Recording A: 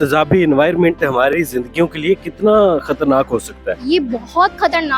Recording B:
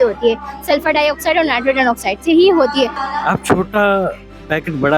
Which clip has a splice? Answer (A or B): B